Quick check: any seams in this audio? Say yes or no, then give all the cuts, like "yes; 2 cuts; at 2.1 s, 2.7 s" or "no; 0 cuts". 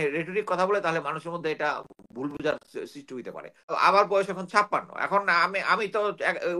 yes; 1 cut; at 3.7 s